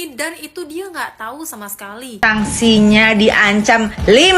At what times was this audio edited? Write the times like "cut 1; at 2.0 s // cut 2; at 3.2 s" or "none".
cut 1; at 2.2 s